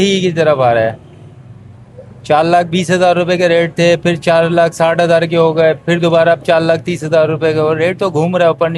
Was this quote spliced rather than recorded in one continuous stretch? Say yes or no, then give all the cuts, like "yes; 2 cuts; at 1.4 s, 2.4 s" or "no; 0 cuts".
no; 0 cuts